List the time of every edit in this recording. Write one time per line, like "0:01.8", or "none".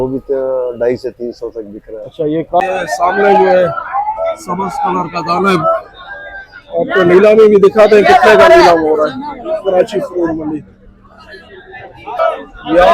0:02.6